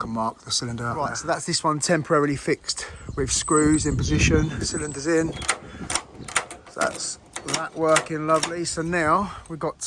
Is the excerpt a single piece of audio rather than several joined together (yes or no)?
yes